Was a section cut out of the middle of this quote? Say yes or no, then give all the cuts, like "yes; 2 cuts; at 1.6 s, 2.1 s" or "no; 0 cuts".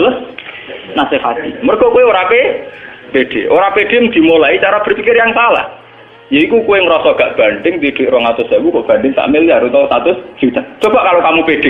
yes; 1 cut; at 10.7 s